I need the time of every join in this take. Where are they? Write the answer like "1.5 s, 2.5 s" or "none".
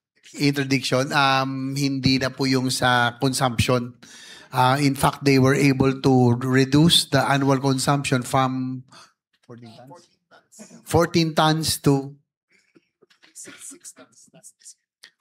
none